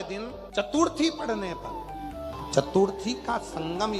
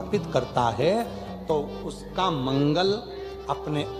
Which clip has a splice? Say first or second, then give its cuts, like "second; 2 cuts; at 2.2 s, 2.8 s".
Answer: first; 1 cut; at 2.2 s